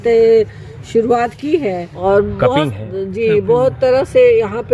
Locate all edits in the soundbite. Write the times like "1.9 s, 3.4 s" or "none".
1.9 s